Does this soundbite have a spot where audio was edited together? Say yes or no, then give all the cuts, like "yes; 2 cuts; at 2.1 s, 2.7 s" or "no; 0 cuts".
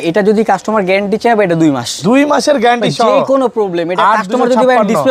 no; 0 cuts